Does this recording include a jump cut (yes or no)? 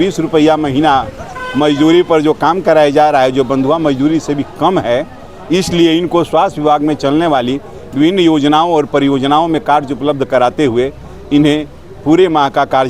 no